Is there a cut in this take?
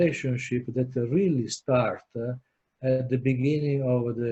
no; 0 cuts

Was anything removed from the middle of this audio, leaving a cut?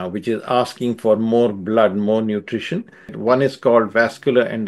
yes; 1 cut; at 3.1 s

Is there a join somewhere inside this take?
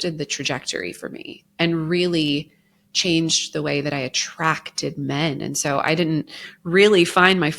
no; 0 cuts

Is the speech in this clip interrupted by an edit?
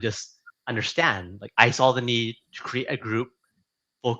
yes; 1 cut; at 1.4 s

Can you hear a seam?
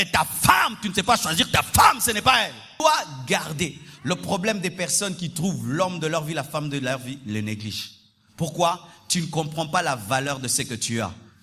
yes; 1 cut; at 2.8 s

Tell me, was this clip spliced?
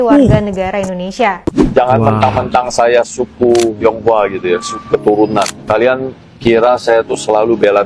yes; 1 cut; at 1.5 s

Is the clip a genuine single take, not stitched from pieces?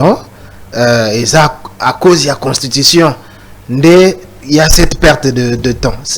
yes; 0 cuts

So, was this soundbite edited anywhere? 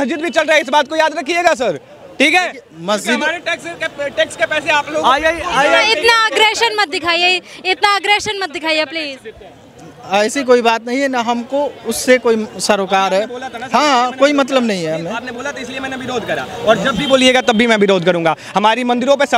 no; 0 cuts

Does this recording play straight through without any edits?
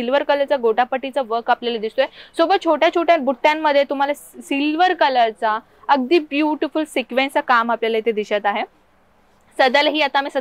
yes; 0 cuts

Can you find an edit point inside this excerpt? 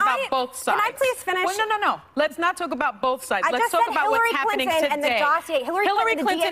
yes; 1 cut; at 2.0 s

